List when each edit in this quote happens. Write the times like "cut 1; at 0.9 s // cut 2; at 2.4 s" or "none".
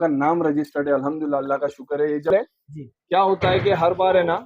cut 1; at 2.3 s